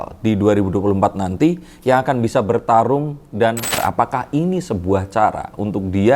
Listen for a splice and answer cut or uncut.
cut